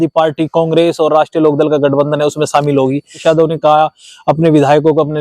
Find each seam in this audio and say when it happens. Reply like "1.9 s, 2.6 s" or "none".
3.2 s